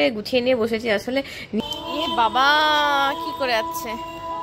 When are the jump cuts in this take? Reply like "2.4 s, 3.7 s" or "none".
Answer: 1.6 s